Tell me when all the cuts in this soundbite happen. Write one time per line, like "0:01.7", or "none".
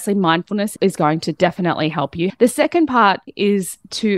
0:02.3
0:03.3